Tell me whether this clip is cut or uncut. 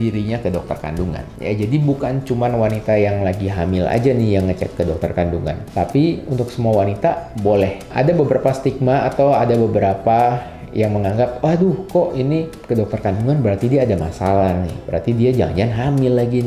uncut